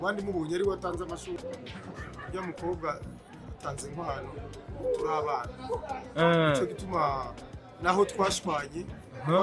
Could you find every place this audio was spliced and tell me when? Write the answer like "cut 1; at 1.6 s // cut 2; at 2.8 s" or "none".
cut 1; at 1.4 s